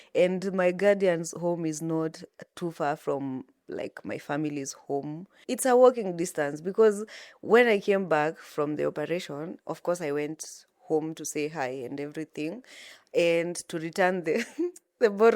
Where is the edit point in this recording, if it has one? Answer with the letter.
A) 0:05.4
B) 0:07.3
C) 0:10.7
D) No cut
A